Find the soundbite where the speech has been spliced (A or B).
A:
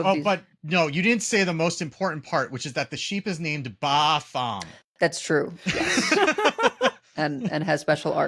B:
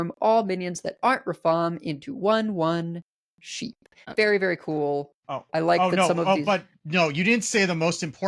B